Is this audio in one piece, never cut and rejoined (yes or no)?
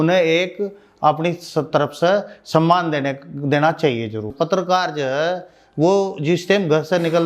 no